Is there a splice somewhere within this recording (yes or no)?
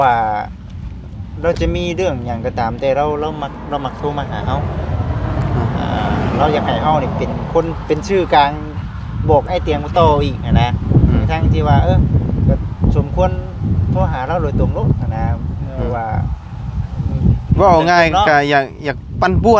no